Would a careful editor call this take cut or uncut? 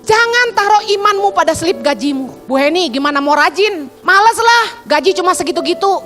cut